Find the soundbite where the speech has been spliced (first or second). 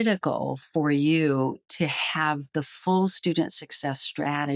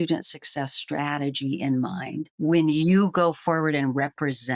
second